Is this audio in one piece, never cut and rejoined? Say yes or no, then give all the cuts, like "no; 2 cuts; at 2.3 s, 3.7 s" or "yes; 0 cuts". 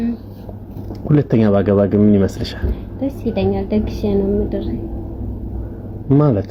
yes; 0 cuts